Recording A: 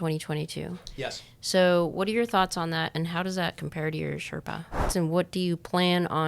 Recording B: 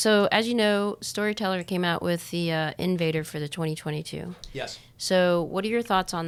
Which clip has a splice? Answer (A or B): A